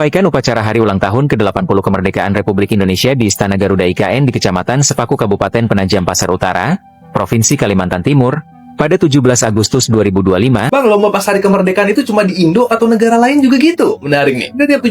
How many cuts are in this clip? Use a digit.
1